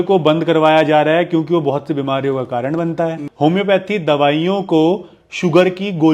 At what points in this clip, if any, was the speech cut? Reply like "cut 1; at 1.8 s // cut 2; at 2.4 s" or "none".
cut 1; at 3.2 s